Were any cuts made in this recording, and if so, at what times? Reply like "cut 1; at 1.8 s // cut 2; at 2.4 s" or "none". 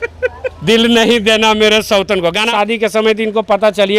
cut 1; at 2.5 s